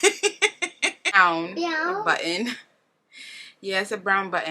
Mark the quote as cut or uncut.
cut